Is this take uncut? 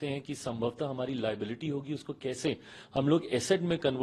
yes; 0 cuts

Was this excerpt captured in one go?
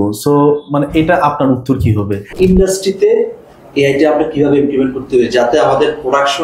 no; 1 cut; at 2.3 s

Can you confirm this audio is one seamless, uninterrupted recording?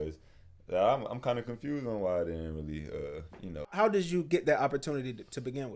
no; 1 cut; at 3.7 s

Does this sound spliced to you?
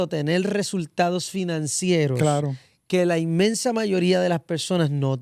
no; 0 cuts

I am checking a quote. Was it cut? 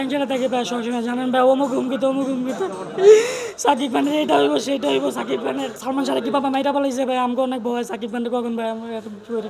yes; 1 cut; at 5.8 s

